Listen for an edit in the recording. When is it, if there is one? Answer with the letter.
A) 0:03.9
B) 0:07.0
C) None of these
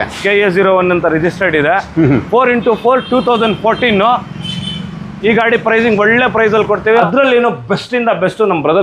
B